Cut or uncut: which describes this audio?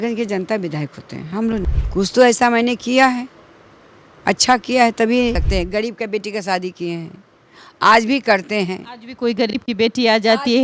cut